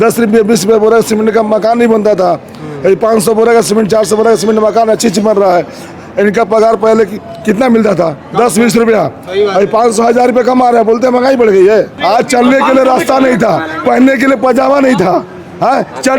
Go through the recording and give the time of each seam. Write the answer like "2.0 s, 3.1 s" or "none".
11.9 s